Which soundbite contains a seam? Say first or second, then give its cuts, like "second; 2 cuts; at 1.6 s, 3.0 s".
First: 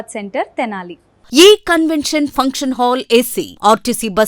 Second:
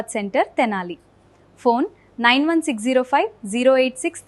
first; 1 cut; at 1.1 s